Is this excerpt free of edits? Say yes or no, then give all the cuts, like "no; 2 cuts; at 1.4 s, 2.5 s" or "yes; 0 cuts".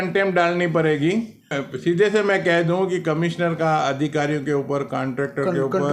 no; 1 cut; at 1.6 s